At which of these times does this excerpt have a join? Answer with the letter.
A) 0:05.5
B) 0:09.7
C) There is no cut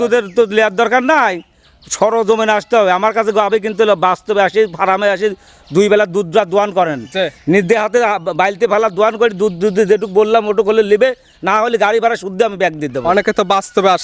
C